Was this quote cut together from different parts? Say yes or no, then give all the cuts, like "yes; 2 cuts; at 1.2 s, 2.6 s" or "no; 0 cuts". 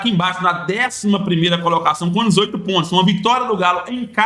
no; 0 cuts